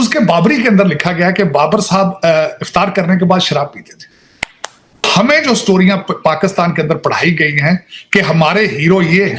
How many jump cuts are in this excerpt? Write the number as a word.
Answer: one